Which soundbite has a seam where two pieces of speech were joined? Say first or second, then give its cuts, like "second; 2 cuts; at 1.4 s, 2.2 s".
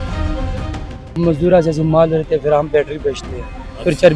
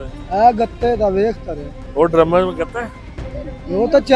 first; 1 cut; at 1.2 s